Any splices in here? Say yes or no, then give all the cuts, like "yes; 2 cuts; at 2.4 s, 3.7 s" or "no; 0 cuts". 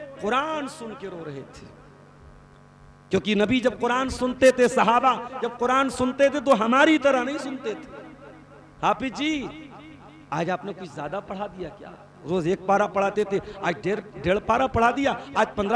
no; 0 cuts